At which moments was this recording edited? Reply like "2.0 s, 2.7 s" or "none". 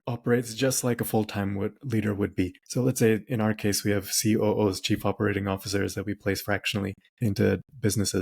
2.6 s, 7.0 s